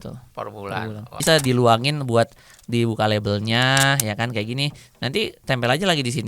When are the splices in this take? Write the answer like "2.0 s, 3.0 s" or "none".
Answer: 1.1 s